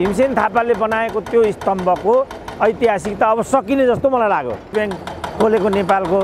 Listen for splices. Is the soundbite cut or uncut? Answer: cut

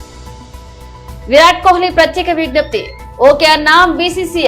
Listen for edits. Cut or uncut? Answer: uncut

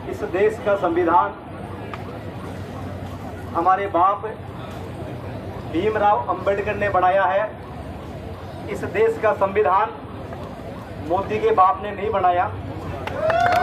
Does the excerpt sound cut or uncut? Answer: uncut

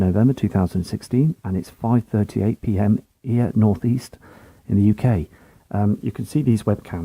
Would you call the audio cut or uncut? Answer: uncut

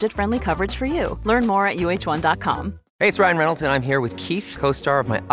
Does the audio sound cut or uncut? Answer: cut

